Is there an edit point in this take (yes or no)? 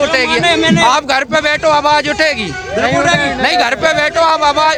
no